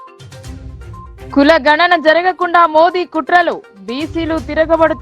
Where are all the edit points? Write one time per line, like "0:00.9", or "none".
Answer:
0:01.3